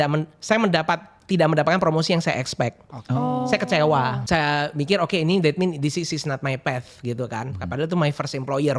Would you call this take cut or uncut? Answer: cut